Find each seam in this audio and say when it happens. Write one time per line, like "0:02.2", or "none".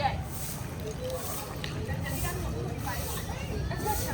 none